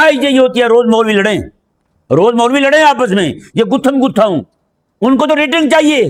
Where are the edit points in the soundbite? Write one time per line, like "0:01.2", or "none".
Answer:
none